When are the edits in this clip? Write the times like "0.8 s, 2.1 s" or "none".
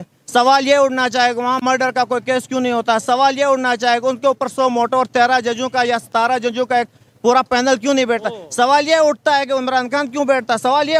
none